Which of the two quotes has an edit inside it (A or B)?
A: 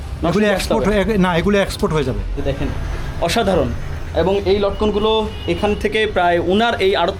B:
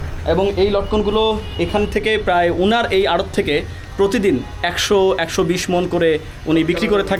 A